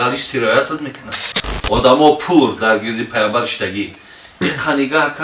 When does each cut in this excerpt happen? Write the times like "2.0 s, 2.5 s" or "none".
1.5 s